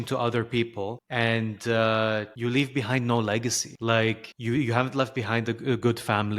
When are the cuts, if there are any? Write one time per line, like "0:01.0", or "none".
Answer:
0:01.0
0:02.3
0:03.7
0:04.3